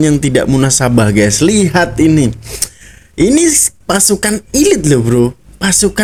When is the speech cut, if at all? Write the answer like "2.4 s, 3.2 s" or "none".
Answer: none